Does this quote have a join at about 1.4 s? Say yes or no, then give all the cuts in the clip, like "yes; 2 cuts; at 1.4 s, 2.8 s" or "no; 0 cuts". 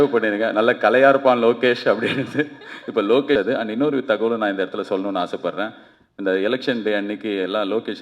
no; 1 cut; at 3.4 s